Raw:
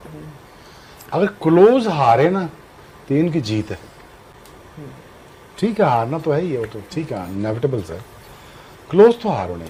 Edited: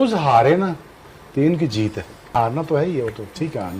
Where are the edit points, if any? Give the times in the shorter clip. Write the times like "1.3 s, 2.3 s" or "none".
2.3 s